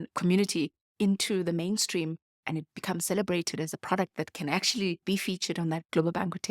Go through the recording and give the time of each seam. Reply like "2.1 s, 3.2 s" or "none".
2.7 s, 5.2 s